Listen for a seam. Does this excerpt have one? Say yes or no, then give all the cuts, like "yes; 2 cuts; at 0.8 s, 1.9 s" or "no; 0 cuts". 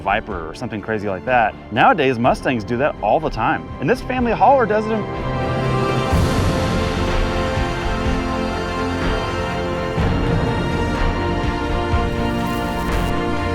yes; 3 cuts; at 1.6 s, 3.7 s, 5.1 s